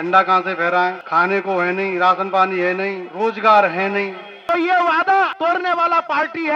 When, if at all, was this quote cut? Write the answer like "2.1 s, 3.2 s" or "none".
1.0 s, 3.1 s, 4.3 s, 5.3 s